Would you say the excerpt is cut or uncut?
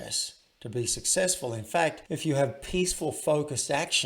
cut